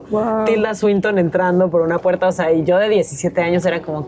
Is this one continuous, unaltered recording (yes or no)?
yes